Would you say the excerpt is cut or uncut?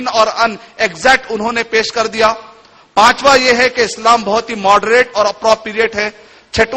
uncut